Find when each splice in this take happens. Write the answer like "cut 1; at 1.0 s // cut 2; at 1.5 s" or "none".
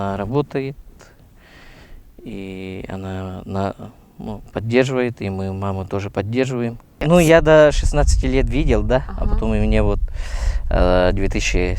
cut 1; at 6.9 s